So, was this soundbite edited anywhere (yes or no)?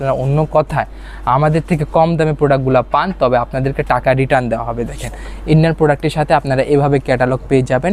no